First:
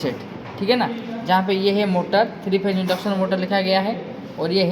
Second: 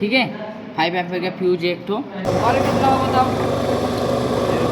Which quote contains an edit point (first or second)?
second